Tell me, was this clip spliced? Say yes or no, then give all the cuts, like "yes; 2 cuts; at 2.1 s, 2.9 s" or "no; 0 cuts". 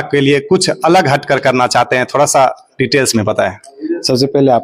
no; 0 cuts